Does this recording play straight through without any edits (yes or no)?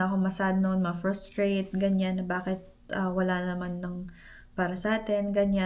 yes